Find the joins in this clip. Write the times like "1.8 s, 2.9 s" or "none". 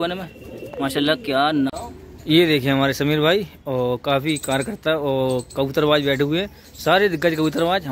1.8 s